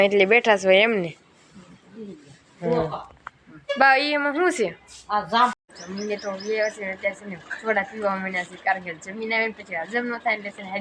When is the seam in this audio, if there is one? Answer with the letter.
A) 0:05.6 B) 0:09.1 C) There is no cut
A